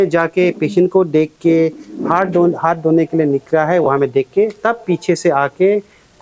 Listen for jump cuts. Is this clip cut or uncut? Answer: uncut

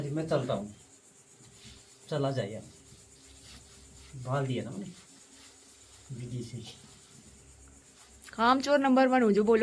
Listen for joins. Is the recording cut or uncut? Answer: uncut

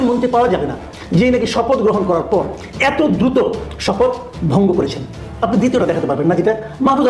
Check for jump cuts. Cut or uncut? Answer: uncut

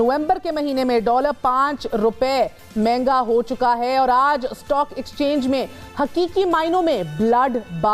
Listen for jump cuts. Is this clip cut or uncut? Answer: uncut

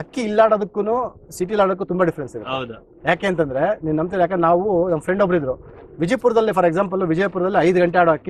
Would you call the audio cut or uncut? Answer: uncut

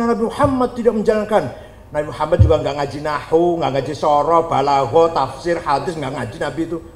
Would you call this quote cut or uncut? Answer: uncut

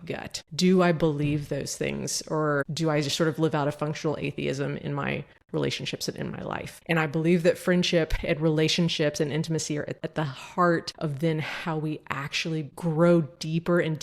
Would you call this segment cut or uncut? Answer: cut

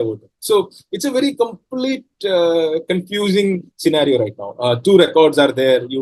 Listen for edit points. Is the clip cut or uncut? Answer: uncut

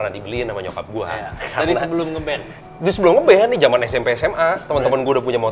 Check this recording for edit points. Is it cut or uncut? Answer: uncut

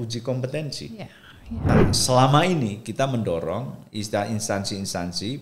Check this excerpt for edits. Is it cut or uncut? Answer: cut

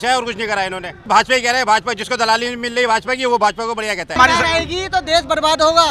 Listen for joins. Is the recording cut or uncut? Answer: cut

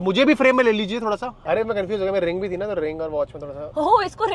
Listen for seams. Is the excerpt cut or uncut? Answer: cut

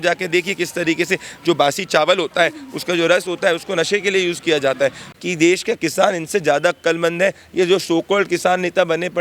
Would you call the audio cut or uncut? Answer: cut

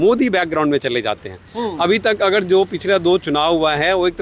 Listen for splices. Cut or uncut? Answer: uncut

